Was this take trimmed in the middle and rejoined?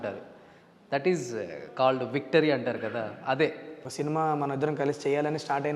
yes; 1 cut; at 3.9 s

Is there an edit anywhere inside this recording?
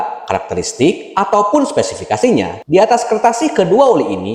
yes; 1 cut; at 2.6 s

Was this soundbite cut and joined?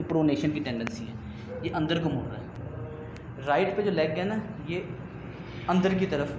yes; 1 cut; at 2.5 s

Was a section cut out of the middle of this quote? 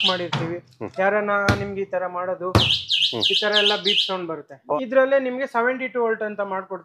yes; 1 cut; at 4.8 s

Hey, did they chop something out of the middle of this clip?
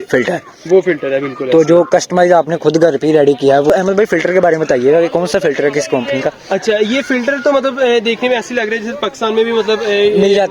yes; 1 cut; at 3.7 s

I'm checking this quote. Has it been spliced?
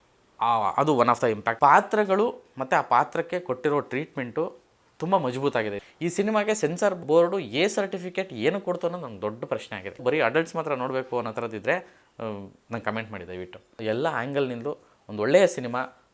yes; 5 cuts; at 1.5 s, 5.9 s, 7.0 s, 10.0 s, 13.7 s

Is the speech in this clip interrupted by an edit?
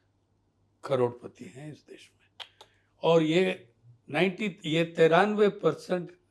no; 0 cuts

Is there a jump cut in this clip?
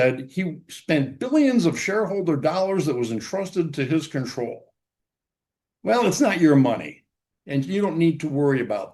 no; 0 cuts

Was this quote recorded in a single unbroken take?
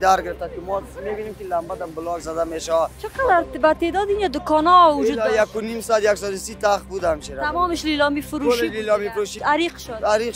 no; 2 cuts; at 3.0 s, 9.4 s

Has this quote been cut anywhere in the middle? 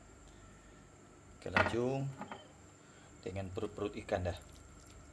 no; 0 cuts

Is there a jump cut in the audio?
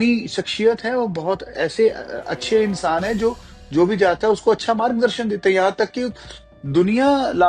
no; 0 cuts

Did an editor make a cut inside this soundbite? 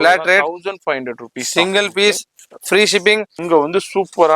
yes; 1 cut; at 3.3 s

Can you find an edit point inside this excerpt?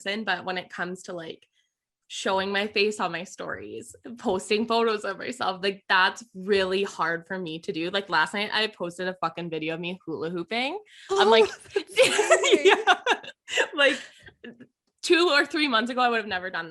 no; 0 cuts

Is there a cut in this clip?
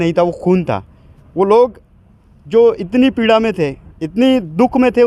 no; 0 cuts

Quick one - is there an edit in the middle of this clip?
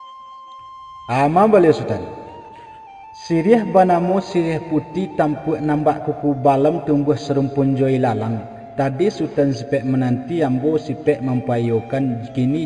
yes; 1 cut; at 1.0 s

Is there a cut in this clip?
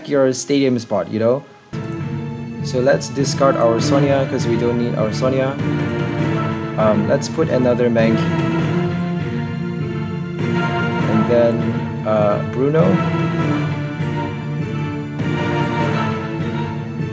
yes; 1 cut; at 1.7 s

